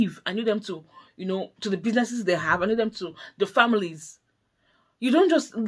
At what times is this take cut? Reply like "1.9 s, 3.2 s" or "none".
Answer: none